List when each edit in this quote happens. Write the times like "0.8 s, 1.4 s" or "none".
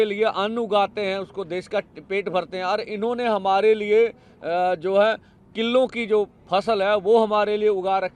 none